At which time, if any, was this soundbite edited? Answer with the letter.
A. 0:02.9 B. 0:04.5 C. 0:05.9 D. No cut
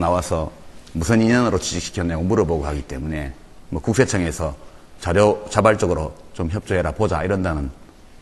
C